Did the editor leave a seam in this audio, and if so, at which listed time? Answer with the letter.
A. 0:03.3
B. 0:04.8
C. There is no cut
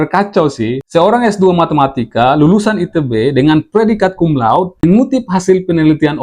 B